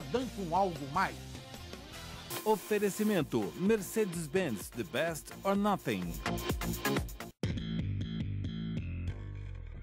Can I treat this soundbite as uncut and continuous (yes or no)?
no